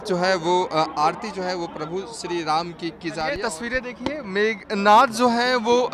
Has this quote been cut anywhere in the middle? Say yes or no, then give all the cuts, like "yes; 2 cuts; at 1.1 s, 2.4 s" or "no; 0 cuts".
yes; 1 cut; at 3.4 s